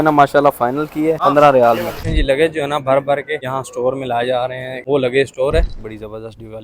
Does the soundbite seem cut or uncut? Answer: cut